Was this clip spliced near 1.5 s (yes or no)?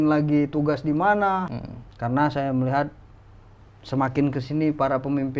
yes